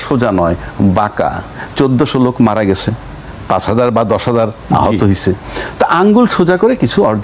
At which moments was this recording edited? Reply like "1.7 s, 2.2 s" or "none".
none

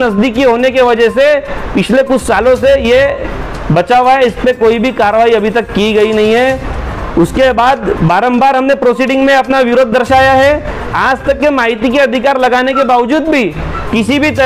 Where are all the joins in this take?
none

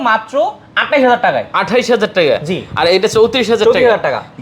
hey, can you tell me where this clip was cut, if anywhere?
none

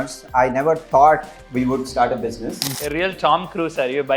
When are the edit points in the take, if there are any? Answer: 2.7 s

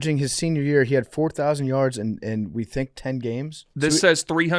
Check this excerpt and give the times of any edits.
3.6 s

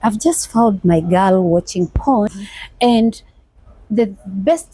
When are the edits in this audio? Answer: 2.3 s

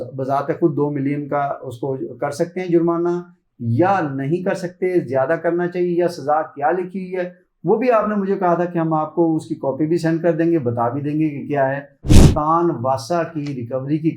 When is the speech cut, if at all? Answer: 12.1 s

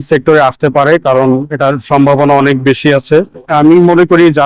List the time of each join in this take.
3.4 s

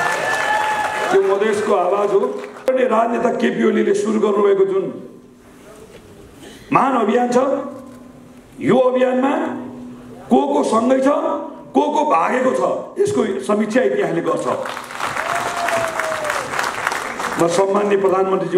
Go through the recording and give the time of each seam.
2.7 s

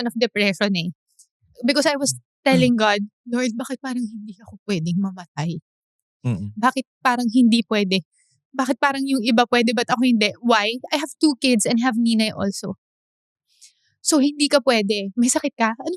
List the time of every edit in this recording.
none

